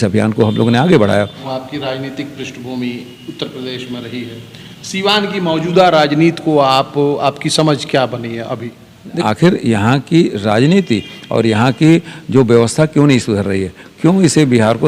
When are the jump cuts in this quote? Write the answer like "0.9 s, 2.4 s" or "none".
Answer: 1.4 s, 9.2 s